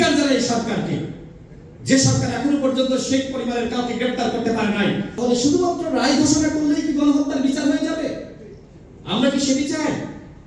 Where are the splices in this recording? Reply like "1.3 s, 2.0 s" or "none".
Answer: 5.1 s